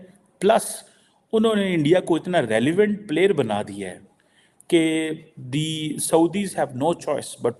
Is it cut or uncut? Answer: uncut